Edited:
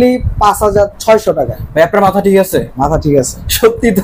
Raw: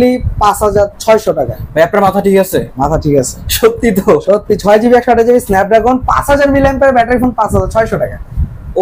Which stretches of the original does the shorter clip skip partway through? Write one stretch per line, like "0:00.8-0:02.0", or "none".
none

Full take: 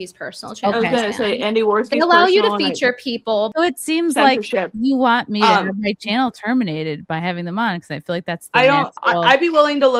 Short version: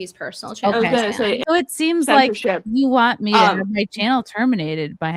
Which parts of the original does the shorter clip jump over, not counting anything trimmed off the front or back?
0:01.4-0:03.5

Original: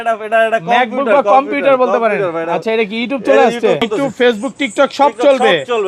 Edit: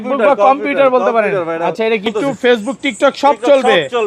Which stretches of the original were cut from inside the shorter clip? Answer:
0:02.9-0:03.8

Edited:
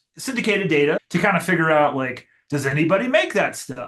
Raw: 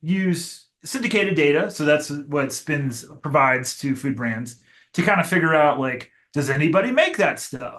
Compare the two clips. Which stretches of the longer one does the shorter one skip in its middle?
0:01.7-0:04.9

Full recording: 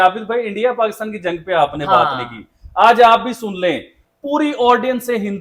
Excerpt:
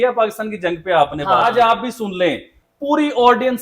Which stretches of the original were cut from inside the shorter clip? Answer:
0:02.0-0:02.9

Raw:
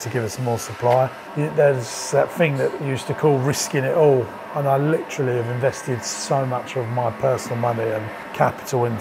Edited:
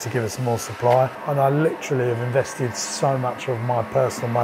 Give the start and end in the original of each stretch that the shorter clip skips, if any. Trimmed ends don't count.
0:01.2-0:04.5

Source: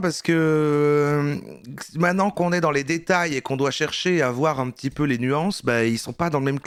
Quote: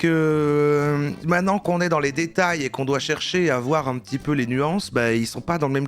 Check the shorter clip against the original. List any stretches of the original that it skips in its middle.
0:01.4-0:01.9

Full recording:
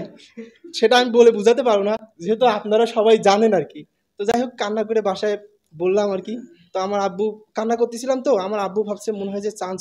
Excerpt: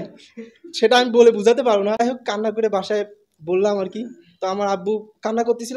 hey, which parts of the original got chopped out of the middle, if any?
0:02.0-0:04.3

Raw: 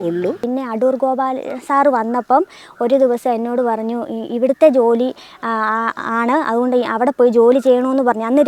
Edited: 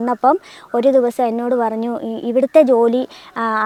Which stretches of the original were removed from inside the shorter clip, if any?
none

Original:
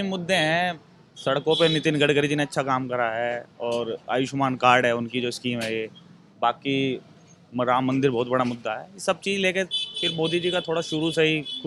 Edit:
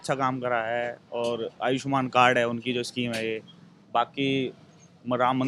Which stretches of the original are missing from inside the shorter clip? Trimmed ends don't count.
none

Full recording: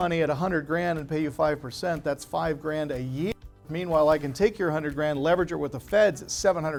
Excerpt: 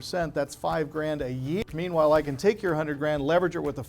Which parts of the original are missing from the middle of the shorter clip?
0:03.4-0:03.7

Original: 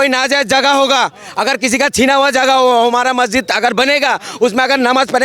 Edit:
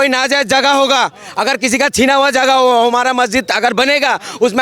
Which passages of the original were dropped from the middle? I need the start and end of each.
none

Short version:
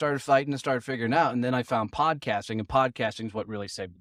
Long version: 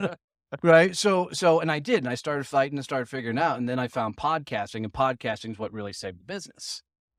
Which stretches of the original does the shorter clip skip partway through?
none

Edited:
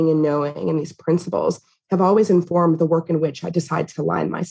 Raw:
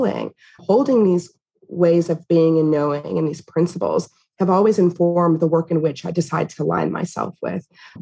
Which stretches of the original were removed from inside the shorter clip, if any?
0:05.0-0:05.1

